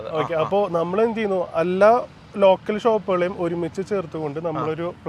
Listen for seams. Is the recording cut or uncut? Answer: uncut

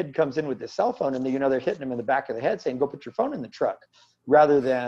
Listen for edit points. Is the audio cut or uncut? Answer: uncut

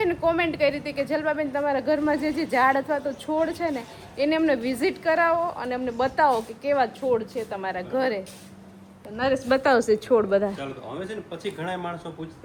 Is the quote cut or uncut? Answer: uncut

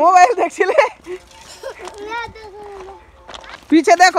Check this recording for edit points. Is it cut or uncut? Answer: uncut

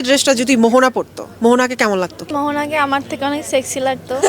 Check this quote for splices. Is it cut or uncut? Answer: cut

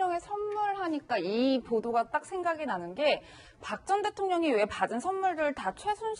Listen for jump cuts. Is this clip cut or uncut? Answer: cut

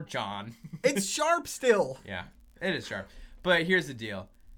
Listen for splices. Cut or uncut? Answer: uncut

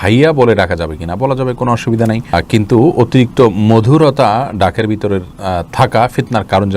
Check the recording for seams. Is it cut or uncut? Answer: uncut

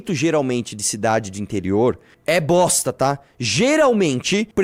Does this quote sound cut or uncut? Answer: uncut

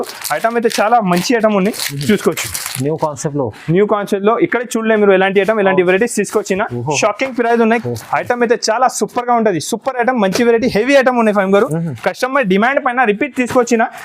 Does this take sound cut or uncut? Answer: cut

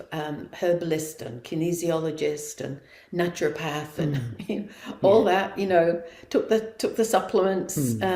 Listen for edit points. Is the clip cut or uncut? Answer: uncut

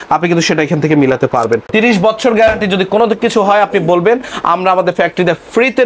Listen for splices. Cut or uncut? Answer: cut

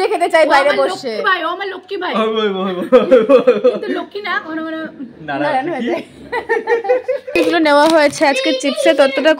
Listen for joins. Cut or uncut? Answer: cut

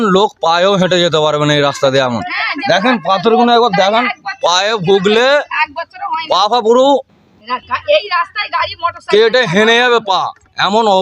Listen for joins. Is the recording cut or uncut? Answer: uncut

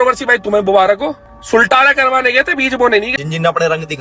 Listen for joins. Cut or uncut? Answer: cut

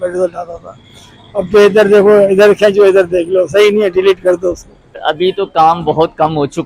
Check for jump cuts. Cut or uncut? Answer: cut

